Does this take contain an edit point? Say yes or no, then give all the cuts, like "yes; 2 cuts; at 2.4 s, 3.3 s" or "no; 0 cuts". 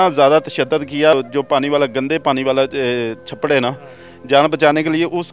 yes; 1 cut; at 1.1 s